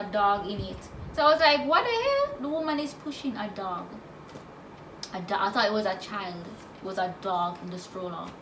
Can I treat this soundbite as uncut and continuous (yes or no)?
yes